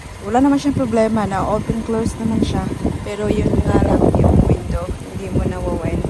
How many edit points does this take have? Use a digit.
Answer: 0